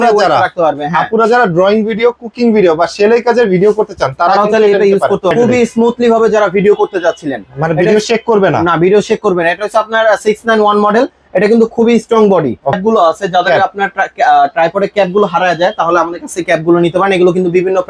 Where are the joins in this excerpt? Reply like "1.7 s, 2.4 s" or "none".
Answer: 5.3 s, 12.8 s

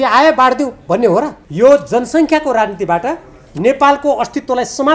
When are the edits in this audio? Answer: 1.4 s

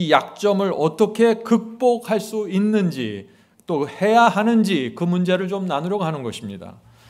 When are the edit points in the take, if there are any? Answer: none

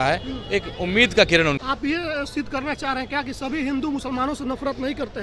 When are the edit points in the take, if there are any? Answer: 1.6 s

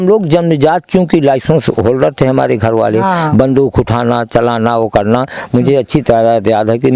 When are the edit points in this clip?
none

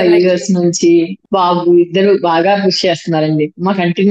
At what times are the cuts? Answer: 1.2 s

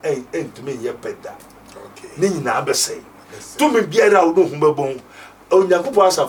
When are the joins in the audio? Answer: none

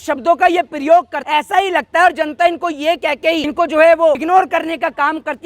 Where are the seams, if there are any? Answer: 1.2 s, 3.5 s, 4.2 s

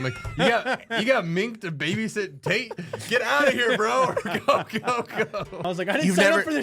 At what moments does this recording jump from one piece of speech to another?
5.5 s

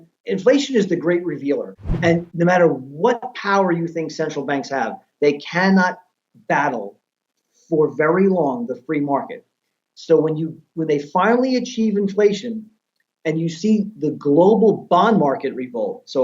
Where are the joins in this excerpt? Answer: 1.7 s

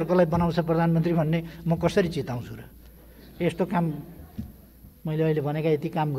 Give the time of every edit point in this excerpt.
none

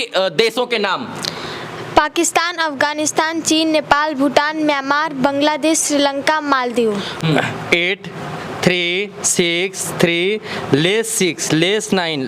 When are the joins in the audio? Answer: 7.2 s

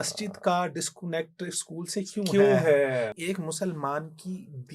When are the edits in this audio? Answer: 3.1 s

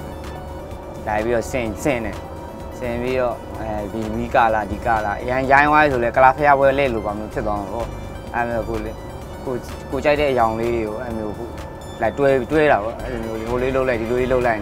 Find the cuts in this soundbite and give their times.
none

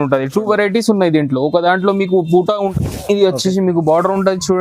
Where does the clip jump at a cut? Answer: 2.7 s

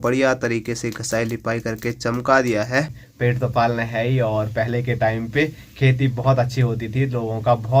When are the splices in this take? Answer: 3.0 s

